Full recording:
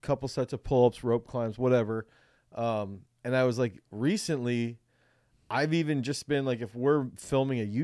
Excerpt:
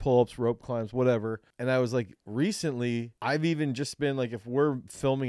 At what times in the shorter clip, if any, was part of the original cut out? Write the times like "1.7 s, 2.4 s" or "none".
1.5 s, 3.1 s